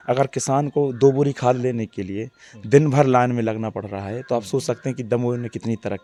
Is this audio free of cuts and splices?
yes; 0 cuts

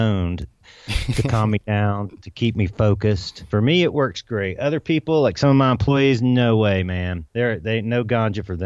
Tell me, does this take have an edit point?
yes; 2 cuts; at 3.4 s, 7.2 s

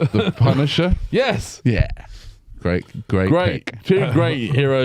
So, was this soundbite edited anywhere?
no; 0 cuts

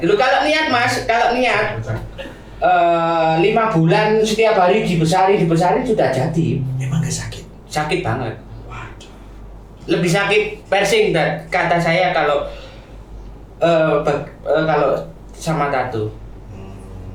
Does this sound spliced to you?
no; 0 cuts

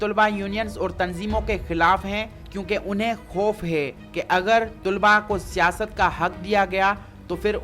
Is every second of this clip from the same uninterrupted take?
no; 1 cut; at 4.0 s

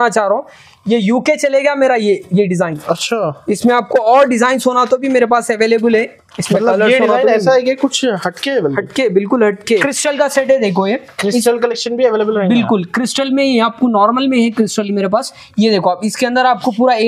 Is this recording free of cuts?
no; 1 cut; at 9.8 s

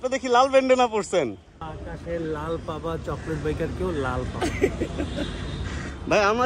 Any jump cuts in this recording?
yes; 1 cut; at 1.7 s

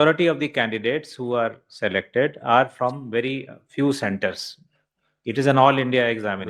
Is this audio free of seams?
yes; 0 cuts

